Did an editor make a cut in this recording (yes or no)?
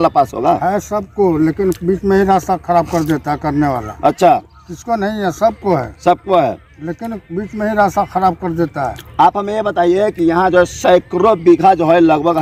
no